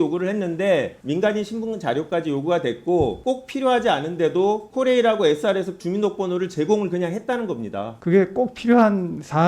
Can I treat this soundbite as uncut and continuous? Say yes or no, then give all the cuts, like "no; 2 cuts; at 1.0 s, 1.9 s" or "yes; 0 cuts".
no; 1 cut; at 7.9 s